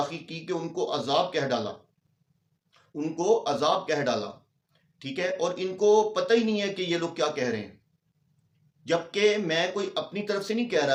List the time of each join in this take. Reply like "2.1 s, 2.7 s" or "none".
none

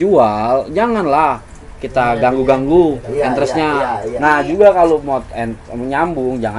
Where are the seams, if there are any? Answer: 4.0 s

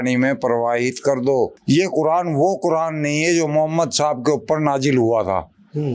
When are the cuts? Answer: 1.6 s

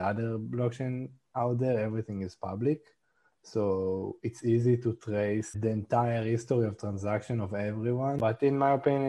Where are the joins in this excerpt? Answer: 5.5 s, 8.2 s

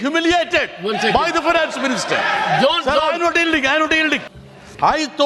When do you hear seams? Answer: 4.3 s

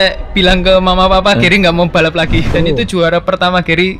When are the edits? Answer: 2.4 s

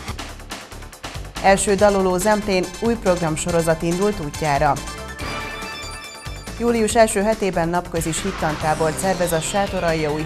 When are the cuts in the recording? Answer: none

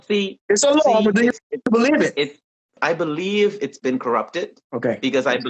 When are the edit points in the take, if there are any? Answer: 2.7 s

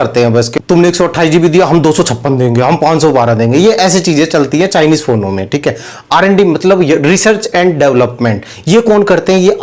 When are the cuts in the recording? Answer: none

